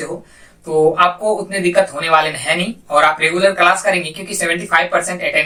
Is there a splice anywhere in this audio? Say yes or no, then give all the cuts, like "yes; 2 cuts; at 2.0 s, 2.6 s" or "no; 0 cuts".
no; 0 cuts